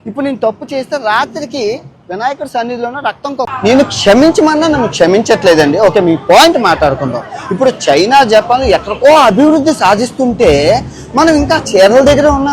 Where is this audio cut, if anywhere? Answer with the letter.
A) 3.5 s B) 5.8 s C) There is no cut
A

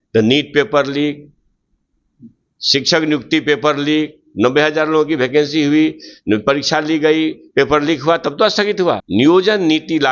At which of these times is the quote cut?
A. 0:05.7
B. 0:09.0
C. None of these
B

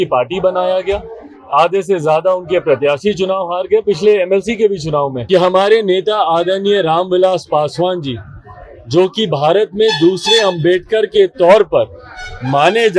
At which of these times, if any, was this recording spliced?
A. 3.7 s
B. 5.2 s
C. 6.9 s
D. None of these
B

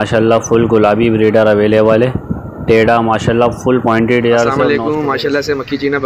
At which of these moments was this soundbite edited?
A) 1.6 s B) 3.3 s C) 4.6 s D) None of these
C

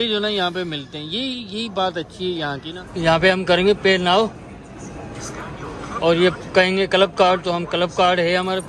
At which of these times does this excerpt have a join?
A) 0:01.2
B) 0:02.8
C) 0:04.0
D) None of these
B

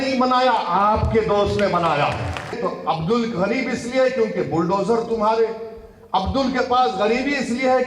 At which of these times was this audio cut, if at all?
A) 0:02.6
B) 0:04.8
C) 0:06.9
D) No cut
A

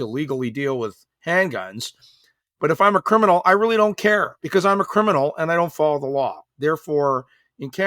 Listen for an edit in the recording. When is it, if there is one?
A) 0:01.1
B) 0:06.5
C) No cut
C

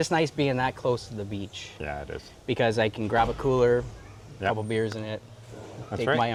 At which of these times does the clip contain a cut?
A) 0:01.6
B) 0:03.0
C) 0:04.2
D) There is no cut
D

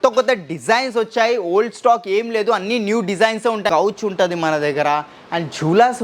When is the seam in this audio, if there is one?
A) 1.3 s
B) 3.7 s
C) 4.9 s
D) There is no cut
B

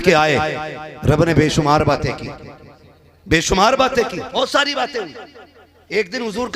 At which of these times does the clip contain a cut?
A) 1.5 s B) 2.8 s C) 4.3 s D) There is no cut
C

